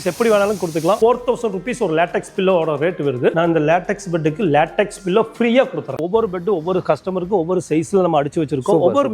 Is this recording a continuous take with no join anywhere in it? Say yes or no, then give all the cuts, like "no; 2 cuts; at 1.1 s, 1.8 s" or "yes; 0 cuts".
no; 3 cuts; at 1.0 s, 3.3 s, 6.0 s